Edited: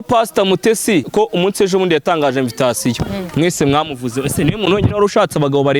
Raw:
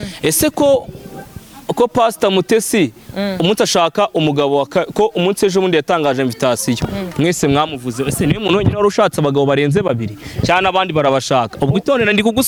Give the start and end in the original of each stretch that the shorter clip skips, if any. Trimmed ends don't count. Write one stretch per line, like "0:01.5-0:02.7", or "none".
0:02.9-0:04.9